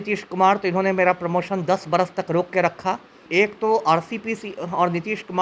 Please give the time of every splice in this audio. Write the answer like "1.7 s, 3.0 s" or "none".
3.2 s